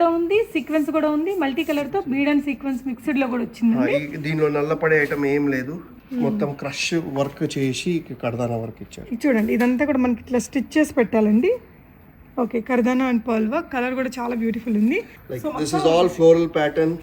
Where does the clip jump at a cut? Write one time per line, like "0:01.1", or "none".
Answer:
0:05.9
0:15.2